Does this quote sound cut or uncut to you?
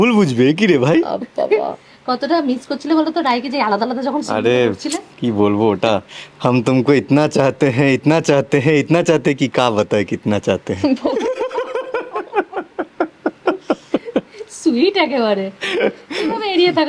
uncut